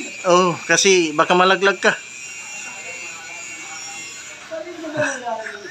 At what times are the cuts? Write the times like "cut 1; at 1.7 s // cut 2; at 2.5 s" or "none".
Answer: none